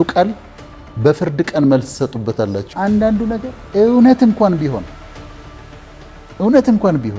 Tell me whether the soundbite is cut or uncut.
cut